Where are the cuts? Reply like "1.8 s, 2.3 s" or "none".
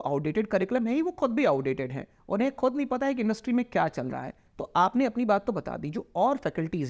none